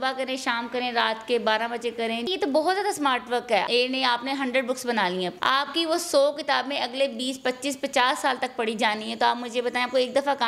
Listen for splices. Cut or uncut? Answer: cut